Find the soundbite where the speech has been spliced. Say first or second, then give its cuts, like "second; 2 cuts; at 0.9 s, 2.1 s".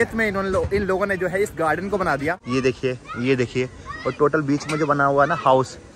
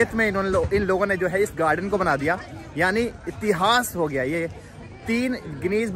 first; 1 cut; at 2.4 s